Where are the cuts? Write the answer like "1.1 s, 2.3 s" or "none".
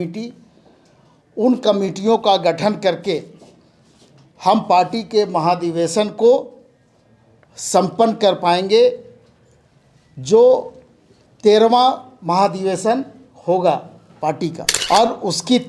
14.7 s